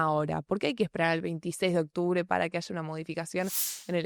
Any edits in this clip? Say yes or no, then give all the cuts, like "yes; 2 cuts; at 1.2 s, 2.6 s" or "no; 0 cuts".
no; 0 cuts